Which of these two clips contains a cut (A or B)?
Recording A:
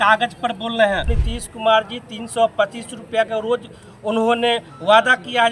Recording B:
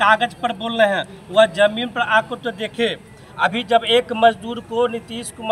A